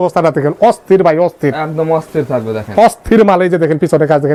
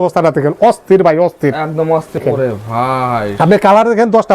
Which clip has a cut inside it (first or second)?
second